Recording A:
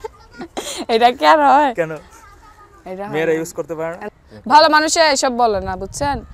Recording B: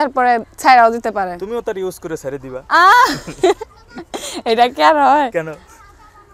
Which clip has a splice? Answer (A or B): A